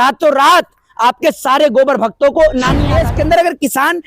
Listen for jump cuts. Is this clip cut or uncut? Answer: cut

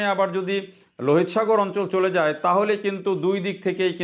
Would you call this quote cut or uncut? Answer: uncut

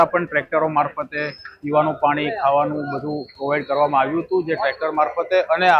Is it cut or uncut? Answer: uncut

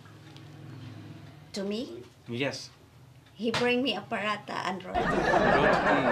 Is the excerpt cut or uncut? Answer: cut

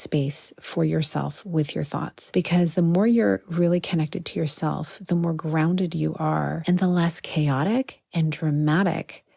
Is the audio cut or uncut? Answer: cut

